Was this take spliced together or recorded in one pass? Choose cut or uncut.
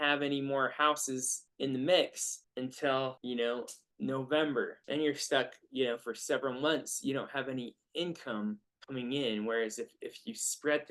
uncut